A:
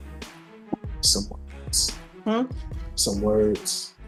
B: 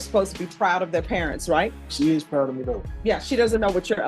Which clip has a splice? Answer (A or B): B